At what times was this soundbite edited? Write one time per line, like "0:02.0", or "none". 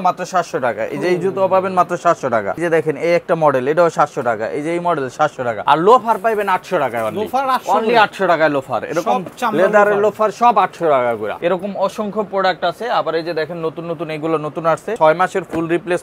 0:02.6
0:05.6
0:11.3
0:15.0